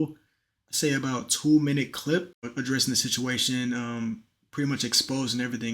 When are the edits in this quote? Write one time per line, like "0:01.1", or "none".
0:02.5